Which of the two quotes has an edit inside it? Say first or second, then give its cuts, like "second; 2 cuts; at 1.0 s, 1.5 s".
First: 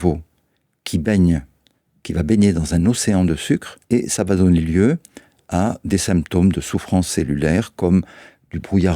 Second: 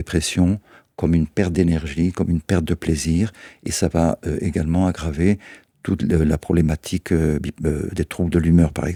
first; 1 cut; at 3.7 s